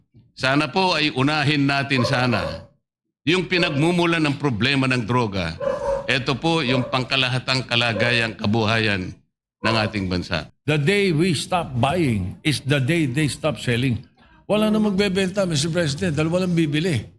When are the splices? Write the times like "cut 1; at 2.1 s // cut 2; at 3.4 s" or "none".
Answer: cut 1; at 10.4 s